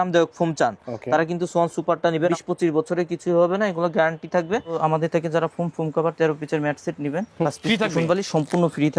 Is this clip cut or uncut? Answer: cut